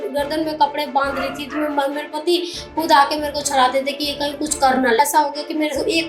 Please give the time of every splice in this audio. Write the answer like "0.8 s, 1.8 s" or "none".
5.0 s